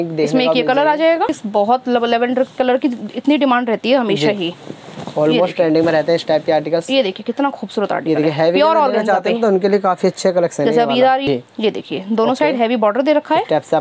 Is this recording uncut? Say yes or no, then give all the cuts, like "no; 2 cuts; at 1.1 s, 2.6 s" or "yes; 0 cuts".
no; 2 cuts; at 1.4 s, 11.2 s